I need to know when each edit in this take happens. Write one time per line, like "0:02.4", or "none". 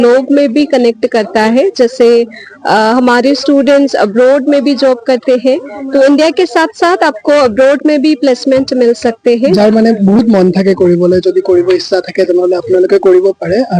0:09.5